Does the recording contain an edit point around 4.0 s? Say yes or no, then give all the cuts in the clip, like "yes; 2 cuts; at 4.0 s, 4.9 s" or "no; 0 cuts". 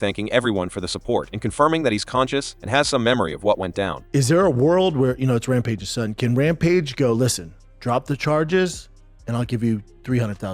yes; 1 cut; at 4.0 s